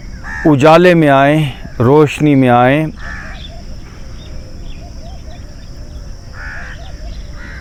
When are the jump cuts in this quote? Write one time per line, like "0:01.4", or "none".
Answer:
none